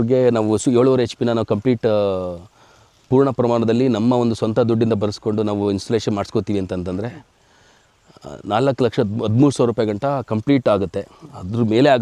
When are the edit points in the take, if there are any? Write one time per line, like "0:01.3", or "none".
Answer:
none

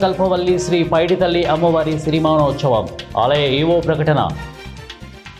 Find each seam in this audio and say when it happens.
0:04.3

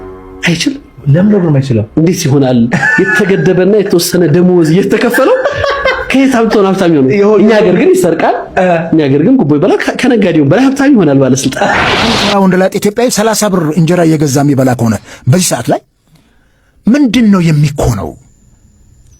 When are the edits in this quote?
0:11.9

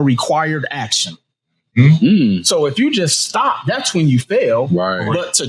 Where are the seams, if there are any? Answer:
none

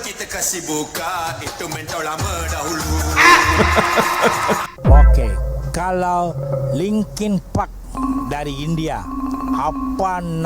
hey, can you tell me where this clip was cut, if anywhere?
0:04.6

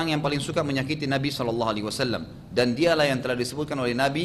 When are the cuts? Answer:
none

